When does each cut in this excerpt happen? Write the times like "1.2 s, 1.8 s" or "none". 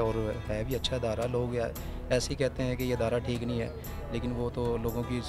none